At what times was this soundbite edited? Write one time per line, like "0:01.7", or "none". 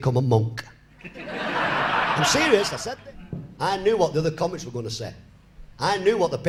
0:02.7

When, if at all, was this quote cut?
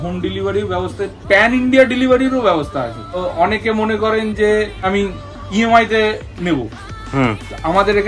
none

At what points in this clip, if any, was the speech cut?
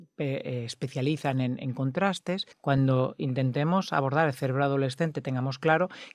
0:02.5

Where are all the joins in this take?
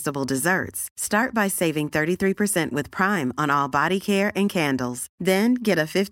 none

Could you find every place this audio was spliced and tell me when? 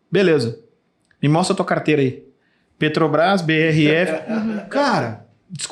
none

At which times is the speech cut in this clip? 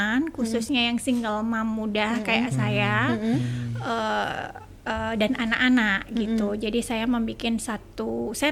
none

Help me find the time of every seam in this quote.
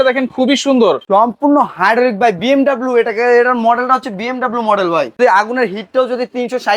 0:01.1
0:05.2

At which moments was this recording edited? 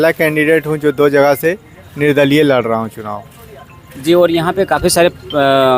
none

